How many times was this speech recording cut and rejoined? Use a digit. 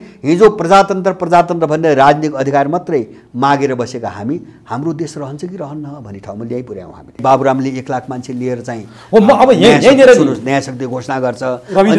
1